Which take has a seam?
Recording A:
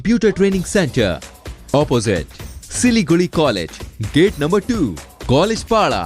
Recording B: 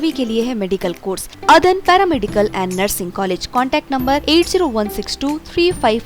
B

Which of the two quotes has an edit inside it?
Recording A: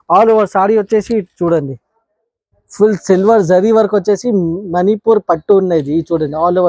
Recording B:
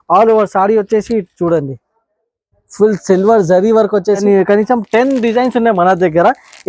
B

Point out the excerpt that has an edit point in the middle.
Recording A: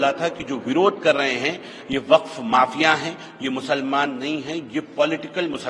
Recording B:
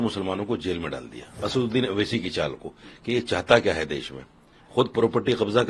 B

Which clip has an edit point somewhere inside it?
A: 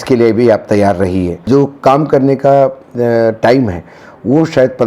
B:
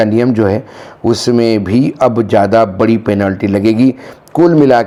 A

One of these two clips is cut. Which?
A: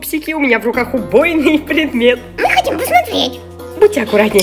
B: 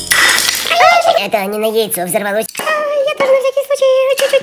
B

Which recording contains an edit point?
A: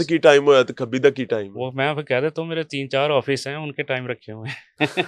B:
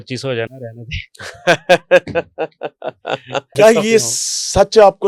B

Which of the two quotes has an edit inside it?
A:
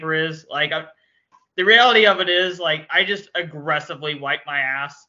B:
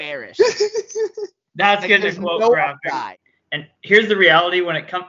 B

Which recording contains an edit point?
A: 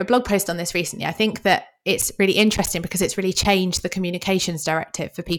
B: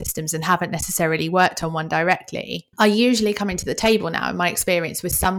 B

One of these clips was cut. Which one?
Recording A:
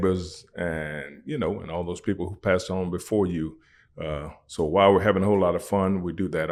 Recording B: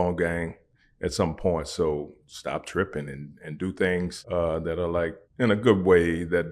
B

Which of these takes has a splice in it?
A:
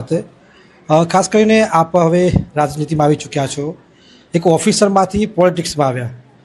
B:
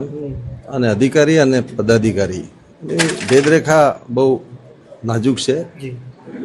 A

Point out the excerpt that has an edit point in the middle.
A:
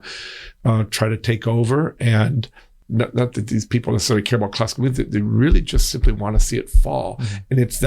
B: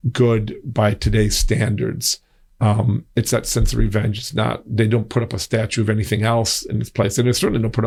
A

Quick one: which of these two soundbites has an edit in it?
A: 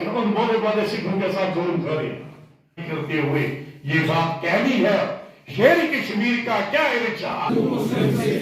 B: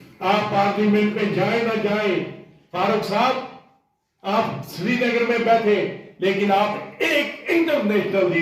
A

